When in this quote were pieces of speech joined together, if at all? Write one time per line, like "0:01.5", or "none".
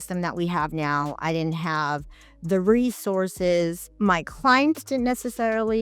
0:03.8

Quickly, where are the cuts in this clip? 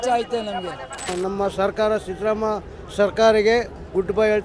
0:01.1

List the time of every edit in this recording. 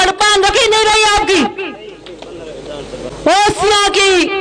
0:03.1

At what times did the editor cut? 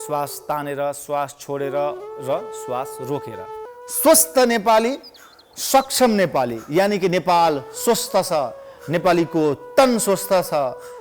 0:03.7

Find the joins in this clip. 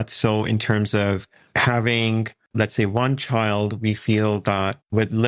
none

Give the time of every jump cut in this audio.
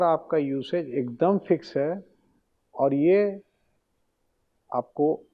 none

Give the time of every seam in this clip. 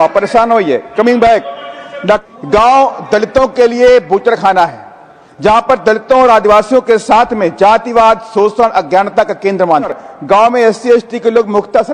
0:02.2
0:10.1

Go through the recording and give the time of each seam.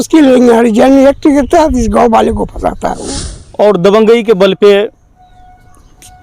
0:03.0

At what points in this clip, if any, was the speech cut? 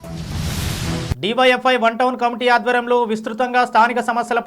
0:01.0

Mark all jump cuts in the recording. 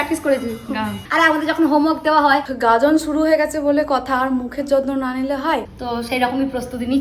0:01.0
0:02.4
0:05.7

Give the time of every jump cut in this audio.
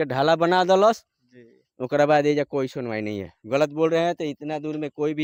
none

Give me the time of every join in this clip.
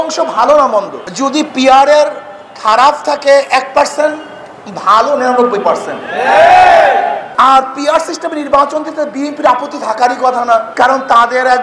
0:01.0
0:07.2
0:10.7

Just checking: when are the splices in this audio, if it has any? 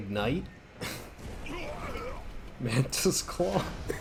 none

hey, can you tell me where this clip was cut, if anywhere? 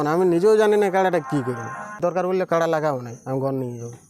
0:01.9

